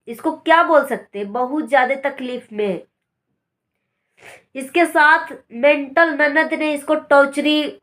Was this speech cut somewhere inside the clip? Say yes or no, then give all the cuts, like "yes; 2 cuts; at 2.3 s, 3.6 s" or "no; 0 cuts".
no; 0 cuts